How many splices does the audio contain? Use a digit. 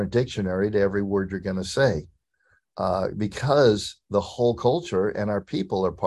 0